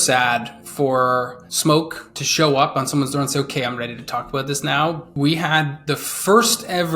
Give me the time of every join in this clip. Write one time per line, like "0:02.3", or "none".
0:01.4
0:05.1